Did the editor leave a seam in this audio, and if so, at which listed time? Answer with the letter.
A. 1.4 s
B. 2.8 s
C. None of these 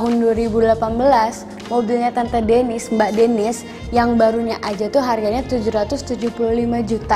C